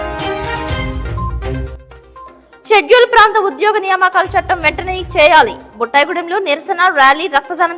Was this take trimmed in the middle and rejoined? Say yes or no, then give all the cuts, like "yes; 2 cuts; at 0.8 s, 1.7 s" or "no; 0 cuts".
yes; 1 cut; at 2.2 s